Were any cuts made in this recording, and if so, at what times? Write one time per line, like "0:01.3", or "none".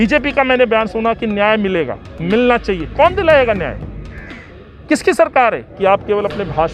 0:05.7